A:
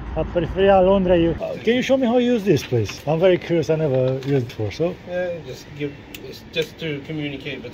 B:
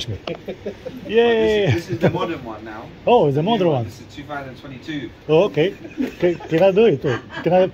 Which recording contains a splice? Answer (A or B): A